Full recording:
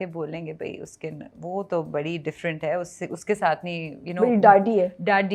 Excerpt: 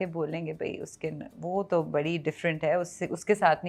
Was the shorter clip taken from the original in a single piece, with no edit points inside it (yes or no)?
yes